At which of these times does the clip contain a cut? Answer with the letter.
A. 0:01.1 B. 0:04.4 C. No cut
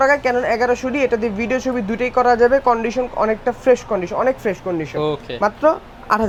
C